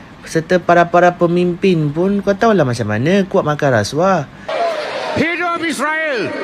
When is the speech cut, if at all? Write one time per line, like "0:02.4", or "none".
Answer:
0:04.4